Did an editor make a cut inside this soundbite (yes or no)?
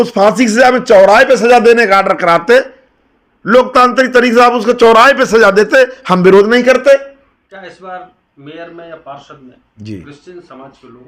yes